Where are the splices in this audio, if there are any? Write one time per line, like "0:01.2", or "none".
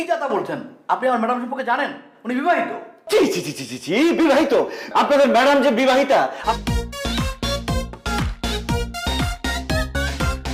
none